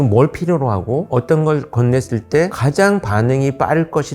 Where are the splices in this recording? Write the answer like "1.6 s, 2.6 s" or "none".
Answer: 1.1 s, 2.6 s